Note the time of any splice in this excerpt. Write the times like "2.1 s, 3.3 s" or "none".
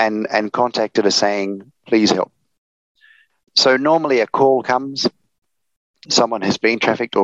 3.4 s, 6.0 s